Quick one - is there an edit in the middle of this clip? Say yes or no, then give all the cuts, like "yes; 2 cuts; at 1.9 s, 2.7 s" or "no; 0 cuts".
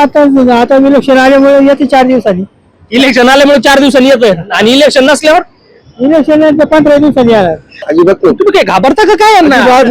yes; 1 cut; at 7.7 s